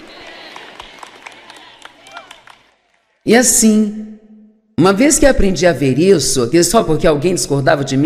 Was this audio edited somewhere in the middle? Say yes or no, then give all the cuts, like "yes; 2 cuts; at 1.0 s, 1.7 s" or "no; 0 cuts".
no; 0 cuts